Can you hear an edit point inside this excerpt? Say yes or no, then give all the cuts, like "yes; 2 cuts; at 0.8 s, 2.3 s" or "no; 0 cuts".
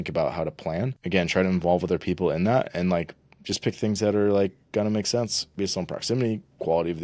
yes; 2 cuts; at 1.0 s, 5.5 s